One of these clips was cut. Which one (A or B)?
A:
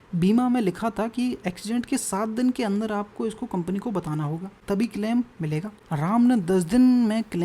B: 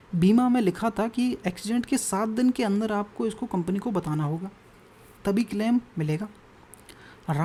A